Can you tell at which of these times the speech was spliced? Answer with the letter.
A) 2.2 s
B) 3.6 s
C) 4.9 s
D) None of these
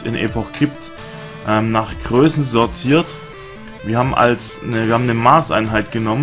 A